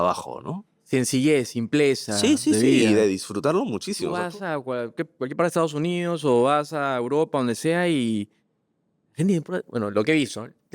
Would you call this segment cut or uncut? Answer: cut